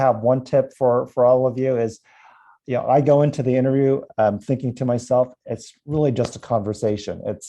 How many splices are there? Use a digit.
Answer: 0